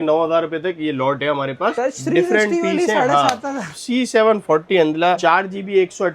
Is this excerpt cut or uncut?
cut